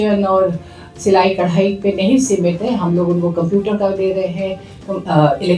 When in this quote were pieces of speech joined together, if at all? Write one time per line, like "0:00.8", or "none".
none